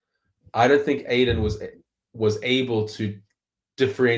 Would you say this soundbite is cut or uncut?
uncut